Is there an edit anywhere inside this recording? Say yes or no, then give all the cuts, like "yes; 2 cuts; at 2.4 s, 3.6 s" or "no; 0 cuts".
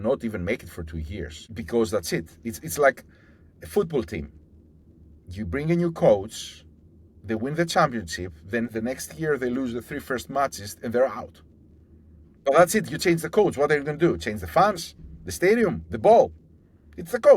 yes; 1 cut; at 1.4 s